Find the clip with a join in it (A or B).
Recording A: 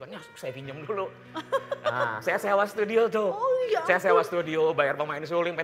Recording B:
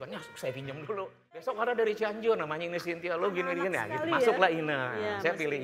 B